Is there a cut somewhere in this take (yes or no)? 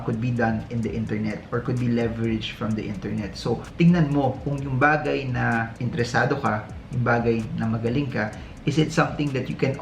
no